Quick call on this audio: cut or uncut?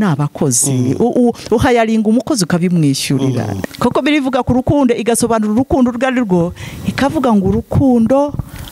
cut